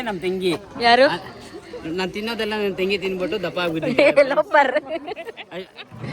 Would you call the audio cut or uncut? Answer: uncut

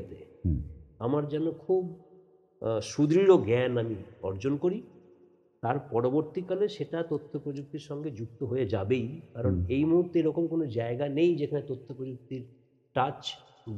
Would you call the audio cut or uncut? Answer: uncut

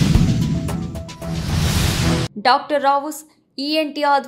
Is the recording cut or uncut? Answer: cut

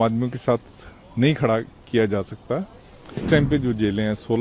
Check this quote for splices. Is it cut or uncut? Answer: cut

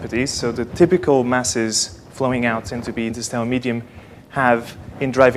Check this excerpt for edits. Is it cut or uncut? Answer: uncut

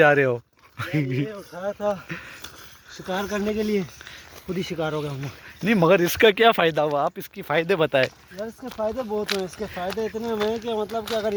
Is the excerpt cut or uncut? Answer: uncut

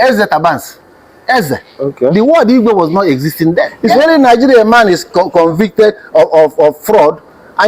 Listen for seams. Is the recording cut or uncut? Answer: cut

